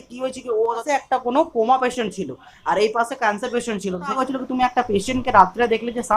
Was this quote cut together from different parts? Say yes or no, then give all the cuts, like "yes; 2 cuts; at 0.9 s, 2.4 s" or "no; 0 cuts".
yes; 2 cuts; at 0.8 s, 4.2 s